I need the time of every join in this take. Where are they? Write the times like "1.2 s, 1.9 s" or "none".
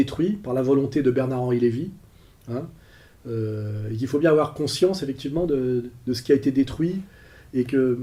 none